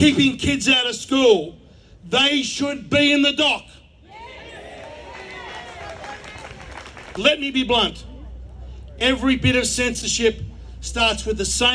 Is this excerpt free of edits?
no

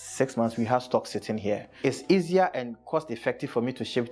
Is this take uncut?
no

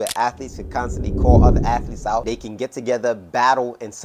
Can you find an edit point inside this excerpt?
no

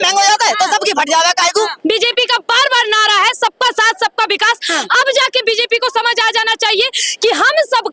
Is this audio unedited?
no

